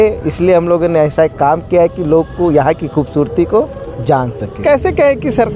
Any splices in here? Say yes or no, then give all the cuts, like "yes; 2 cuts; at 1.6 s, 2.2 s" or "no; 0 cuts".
yes; 1 cut; at 4.6 s